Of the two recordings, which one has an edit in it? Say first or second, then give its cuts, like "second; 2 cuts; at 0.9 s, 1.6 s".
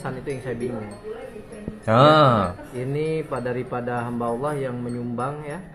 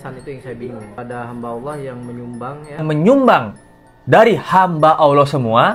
second; 2 cuts; at 0.9 s, 2.8 s